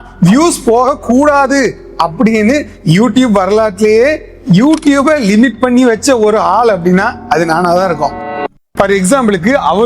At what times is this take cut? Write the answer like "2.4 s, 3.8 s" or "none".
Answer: 8.5 s